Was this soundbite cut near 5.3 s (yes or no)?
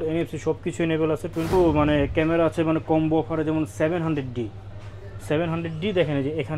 no